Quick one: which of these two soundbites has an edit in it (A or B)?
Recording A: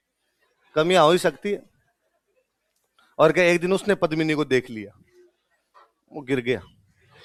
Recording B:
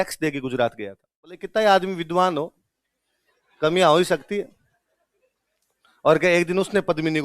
B